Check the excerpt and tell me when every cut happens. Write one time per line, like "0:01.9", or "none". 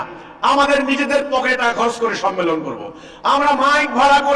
none